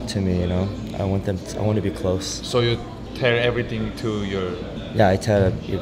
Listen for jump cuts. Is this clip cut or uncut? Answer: cut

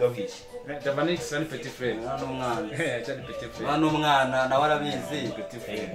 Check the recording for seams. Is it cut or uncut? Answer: uncut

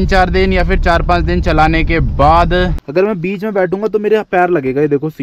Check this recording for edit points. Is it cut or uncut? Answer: cut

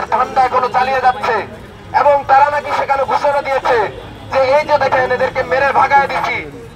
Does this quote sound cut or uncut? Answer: uncut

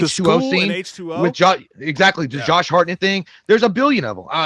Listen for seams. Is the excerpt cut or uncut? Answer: uncut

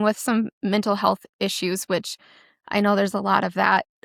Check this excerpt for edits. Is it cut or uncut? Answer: uncut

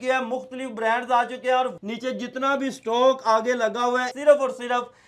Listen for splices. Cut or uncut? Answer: cut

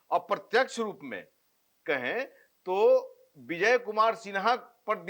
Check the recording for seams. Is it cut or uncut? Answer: uncut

